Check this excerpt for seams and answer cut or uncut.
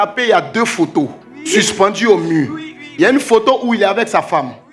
uncut